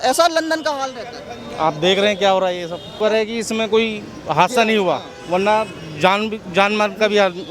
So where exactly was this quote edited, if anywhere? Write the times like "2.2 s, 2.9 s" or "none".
2.9 s